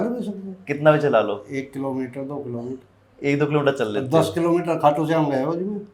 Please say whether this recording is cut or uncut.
uncut